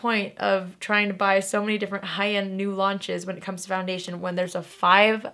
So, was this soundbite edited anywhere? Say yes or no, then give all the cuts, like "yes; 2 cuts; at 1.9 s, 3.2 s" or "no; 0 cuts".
no; 0 cuts